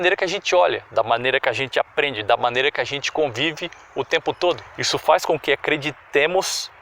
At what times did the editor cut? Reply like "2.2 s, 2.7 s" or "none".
4.7 s